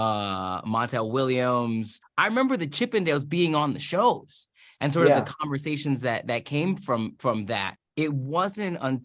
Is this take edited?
yes; 2 cuts; at 2.0 s, 7.8 s

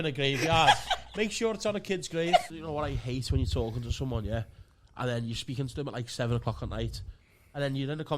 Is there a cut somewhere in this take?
yes; 1 cut; at 2.5 s

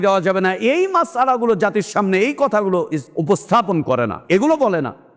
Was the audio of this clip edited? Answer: yes; 2 cuts; at 3.1 s, 4.2 s

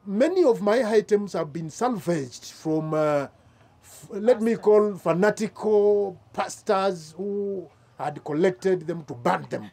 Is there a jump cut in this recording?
no; 0 cuts

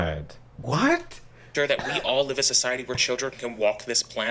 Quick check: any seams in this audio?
no; 0 cuts

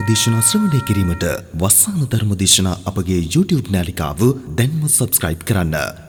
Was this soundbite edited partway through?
no; 0 cuts

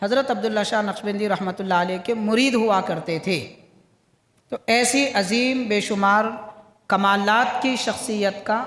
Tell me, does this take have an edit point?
no; 0 cuts

